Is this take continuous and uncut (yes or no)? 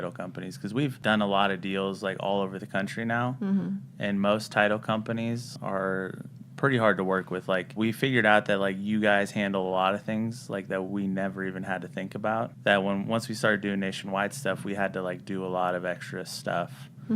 no